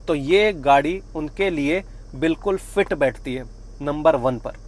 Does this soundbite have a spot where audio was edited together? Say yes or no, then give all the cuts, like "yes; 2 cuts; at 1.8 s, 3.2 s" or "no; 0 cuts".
no; 0 cuts